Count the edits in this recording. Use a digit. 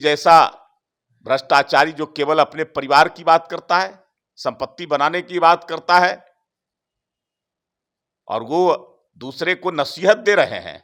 0